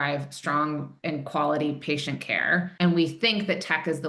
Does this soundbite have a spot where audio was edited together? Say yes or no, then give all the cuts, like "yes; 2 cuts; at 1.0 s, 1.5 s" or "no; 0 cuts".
no; 0 cuts